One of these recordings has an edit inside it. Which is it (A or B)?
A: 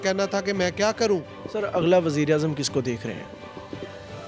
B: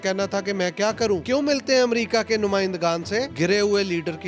B